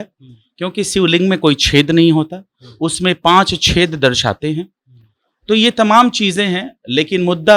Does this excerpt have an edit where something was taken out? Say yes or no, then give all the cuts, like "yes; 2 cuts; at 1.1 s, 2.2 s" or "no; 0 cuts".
no; 0 cuts